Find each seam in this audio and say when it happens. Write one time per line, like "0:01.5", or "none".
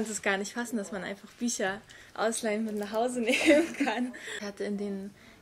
0:04.3

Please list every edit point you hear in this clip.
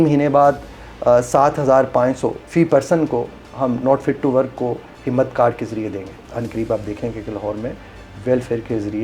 0:02.4
0:06.3

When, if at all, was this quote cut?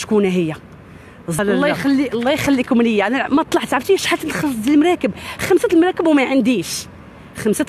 0:01.3

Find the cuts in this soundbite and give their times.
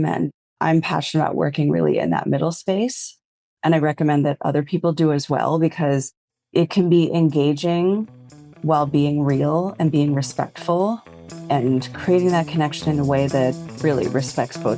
0:13.7

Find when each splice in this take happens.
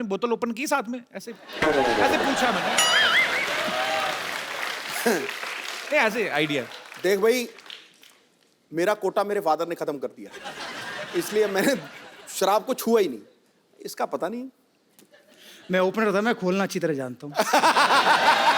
none

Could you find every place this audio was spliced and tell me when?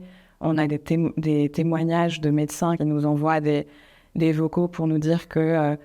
0:02.8

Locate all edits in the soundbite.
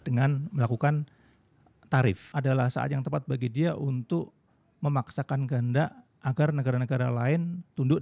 0:02.2

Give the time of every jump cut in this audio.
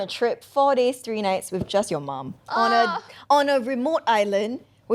none

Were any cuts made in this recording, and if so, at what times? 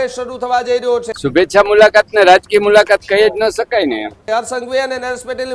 0:01.1
0:04.2

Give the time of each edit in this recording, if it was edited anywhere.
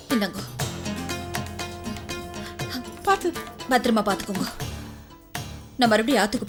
none

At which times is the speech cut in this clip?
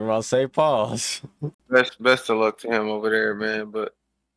0:01.5

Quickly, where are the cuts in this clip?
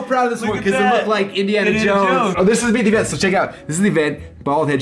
0:02.3

